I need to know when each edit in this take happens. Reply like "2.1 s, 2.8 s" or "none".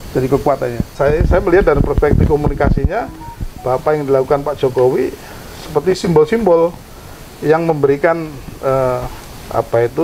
0.9 s

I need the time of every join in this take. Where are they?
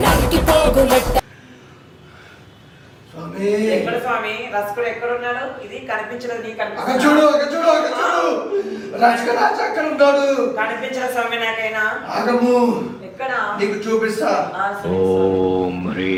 none

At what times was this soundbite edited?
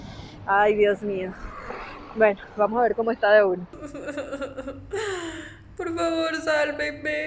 3.7 s

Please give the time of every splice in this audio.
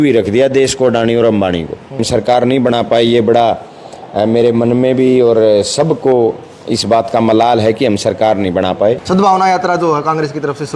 2.1 s, 9.0 s

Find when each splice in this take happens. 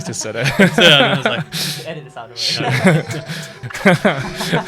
3.5 s

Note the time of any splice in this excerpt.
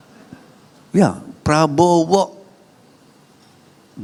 none

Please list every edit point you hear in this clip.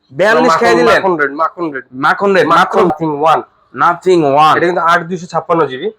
2.9 s

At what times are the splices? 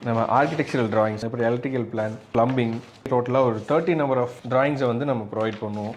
1.2 s, 3.1 s

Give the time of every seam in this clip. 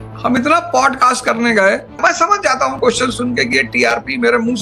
2.0 s

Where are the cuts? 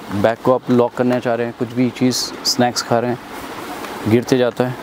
none

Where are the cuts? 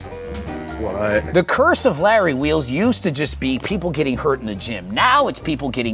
1.3 s

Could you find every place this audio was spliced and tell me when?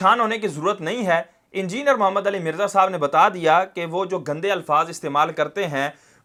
none

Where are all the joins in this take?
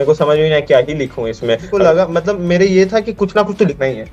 1.7 s

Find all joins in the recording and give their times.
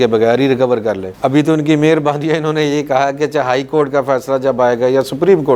none

